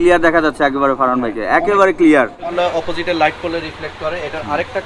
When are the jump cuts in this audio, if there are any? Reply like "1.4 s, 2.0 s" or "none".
2.5 s